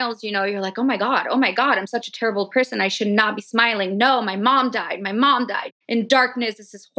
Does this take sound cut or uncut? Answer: cut